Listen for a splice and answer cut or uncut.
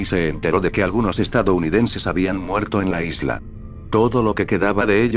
cut